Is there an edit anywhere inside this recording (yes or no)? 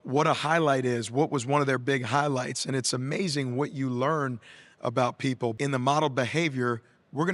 yes